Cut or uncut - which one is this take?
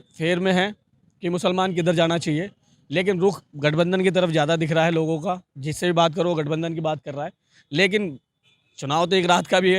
uncut